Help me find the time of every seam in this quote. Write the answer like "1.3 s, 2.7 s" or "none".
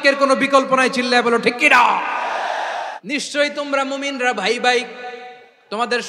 3.0 s

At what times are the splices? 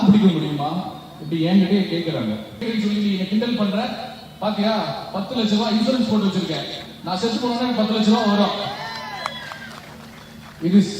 2.6 s

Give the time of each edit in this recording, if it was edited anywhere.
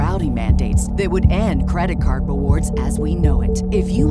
none

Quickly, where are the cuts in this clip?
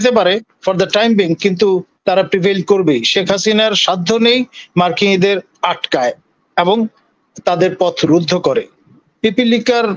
none

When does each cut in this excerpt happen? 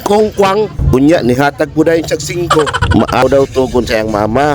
3.2 s

